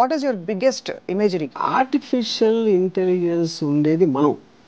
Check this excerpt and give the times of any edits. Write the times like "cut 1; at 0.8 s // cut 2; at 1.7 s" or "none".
cut 1; at 1.6 s